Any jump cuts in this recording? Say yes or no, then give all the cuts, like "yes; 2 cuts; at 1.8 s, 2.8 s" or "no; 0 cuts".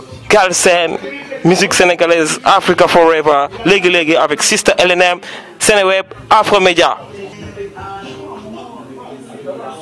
no; 0 cuts